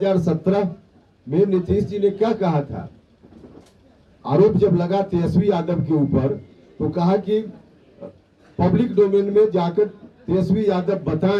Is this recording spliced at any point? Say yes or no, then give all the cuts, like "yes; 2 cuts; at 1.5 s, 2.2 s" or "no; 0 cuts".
no; 0 cuts